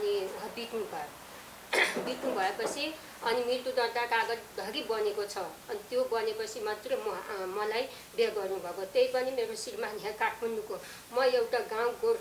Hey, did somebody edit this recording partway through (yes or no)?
no